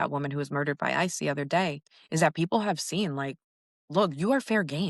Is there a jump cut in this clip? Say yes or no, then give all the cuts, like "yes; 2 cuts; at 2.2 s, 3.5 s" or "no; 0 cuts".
no; 0 cuts